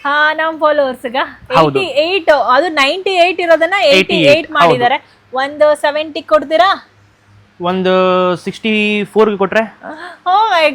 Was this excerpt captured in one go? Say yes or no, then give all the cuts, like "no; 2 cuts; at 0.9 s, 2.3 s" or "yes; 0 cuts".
yes; 0 cuts